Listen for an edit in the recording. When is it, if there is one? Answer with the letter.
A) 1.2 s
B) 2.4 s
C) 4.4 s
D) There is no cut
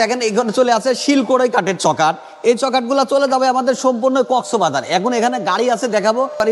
D